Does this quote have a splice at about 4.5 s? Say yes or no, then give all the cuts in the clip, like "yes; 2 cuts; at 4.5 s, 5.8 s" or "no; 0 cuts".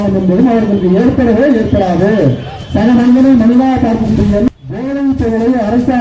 yes; 1 cut; at 4.5 s